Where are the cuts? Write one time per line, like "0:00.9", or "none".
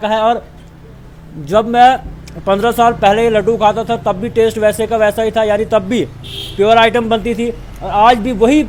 none